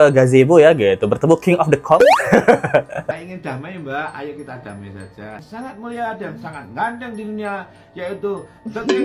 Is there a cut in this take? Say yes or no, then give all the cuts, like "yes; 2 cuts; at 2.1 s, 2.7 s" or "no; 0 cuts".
no; 0 cuts